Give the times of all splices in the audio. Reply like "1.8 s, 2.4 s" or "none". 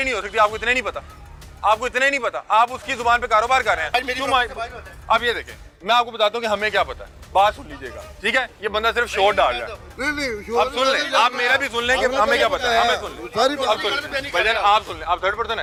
none